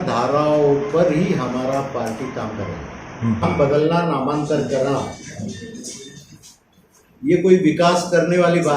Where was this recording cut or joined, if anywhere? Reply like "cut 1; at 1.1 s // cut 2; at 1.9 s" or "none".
cut 1; at 3.4 s